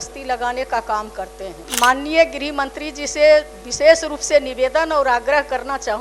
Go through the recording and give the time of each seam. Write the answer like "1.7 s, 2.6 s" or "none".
1.6 s